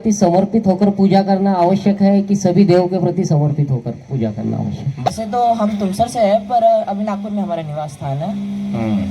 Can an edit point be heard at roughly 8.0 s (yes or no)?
no